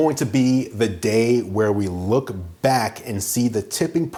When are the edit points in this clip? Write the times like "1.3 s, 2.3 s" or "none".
none